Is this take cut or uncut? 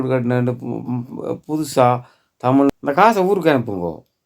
cut